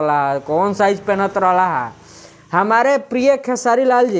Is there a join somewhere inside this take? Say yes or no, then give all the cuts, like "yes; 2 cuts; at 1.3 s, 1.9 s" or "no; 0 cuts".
no; 0 cuts